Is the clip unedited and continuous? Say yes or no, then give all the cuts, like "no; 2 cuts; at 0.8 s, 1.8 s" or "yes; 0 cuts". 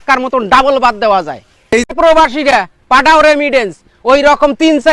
no; 1 cut; at 1.9 s